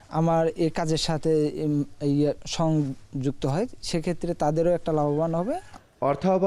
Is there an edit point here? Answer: no; 0 cuts

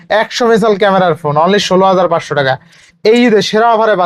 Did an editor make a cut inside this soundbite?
no; 0 cuts

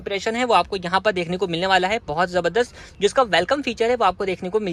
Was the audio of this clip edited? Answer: no; 0 cuts

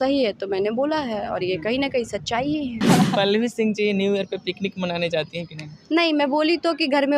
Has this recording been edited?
yes; 1 cut; at 2.8 s

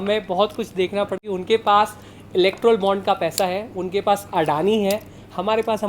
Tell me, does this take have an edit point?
yes; 1 cut; at 1.2 s

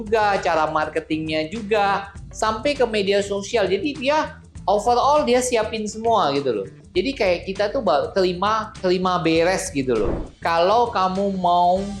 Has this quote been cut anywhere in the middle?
yes; 1 cut; at 10.2 s

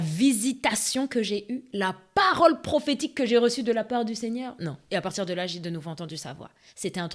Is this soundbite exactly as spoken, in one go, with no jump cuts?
yes; 0 cuts

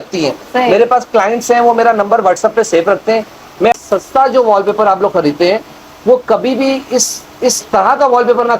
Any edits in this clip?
yes; 1 cut; at 3.8 s

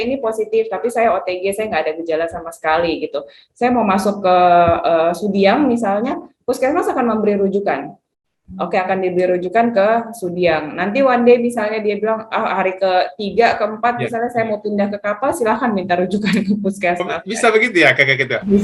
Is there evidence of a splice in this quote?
no; 0 cuts

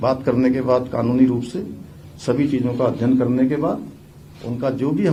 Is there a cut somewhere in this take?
no; 0 cuts

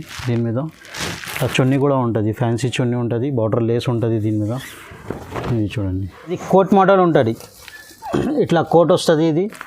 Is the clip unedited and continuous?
no; 1 cut; at 6.4 s

